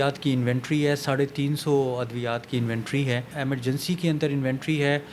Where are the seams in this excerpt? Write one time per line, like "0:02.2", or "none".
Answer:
0:03.3